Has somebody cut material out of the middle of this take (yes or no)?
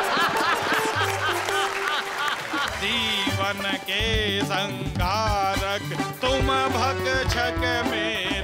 yes